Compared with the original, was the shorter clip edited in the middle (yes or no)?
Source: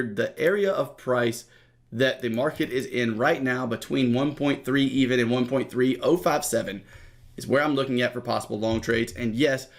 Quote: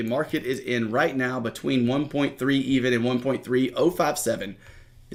no